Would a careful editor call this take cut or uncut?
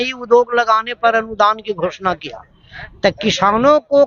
uncut